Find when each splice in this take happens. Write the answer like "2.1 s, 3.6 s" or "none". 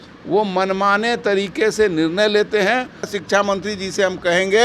3.1 s